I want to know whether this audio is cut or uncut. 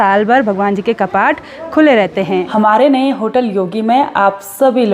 cut